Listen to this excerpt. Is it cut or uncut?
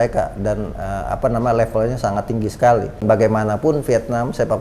cut